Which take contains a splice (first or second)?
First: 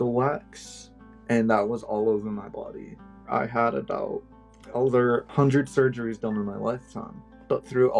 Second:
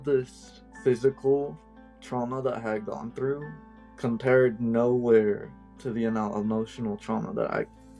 first